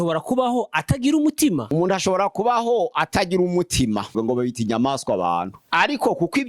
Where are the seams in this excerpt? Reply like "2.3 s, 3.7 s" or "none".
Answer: 1.7 s, 4.1 s, 5.6 s